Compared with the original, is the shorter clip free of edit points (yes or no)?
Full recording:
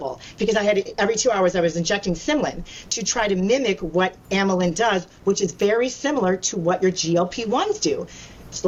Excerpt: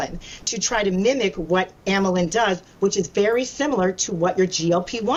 yes